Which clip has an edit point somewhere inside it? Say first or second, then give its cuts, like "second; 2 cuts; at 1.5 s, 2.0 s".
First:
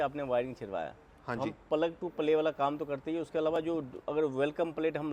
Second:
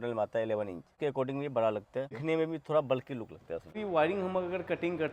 second; 3 cuts; at 0.9 s, 2.2 s, 3.8 s